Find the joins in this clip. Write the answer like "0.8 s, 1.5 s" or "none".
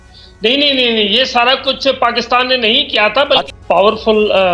3.5 s